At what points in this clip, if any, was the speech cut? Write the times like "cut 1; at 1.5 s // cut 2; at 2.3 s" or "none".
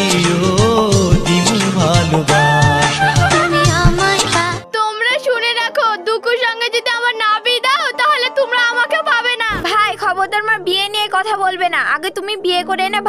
cut 1; at 4.5 s // cut 2; at 9.4 s